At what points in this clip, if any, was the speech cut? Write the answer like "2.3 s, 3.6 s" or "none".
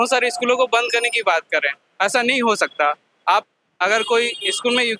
none